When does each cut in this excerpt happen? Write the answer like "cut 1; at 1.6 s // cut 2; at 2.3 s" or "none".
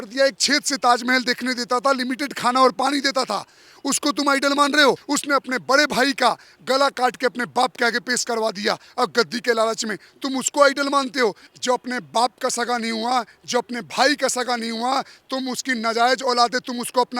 cut 1; at 5.0 s // cut 2; at 11.5 s